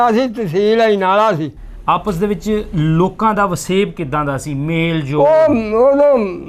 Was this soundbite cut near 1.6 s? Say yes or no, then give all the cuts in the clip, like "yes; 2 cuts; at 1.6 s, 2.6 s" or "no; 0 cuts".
yes; 1 cut; at 1.6 s